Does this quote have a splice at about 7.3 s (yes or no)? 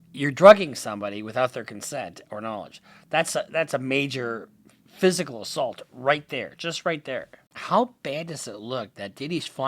yes